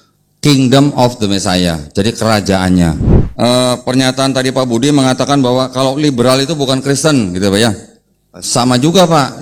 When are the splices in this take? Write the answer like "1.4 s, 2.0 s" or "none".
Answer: 3.1 s